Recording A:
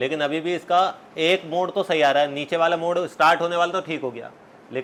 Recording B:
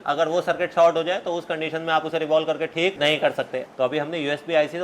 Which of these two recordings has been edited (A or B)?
B